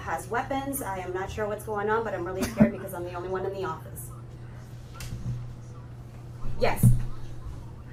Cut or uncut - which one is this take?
uncut